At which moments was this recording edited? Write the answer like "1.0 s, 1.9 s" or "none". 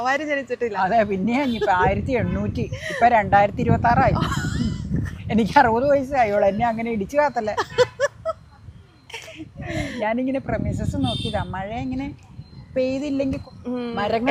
none